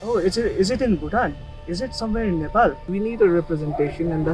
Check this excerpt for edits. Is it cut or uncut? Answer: cut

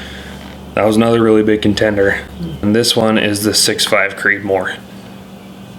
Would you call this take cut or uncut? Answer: cut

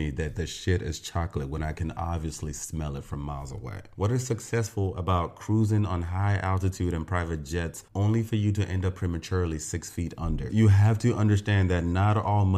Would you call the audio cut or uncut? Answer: cut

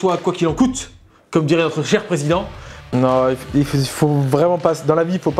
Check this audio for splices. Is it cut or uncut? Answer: cut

